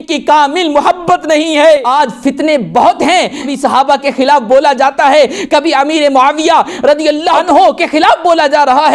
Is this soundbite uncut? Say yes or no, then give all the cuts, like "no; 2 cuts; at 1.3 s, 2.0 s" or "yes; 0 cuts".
no; 2 cuts; at 1.9 s, 3.5 s